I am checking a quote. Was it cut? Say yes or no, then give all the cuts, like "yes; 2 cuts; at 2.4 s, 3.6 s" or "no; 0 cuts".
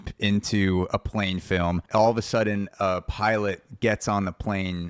yes; 1 cut; at 1.8 s